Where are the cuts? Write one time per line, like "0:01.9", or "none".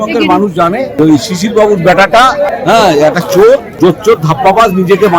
0:00.9
0:02.5
0:03.7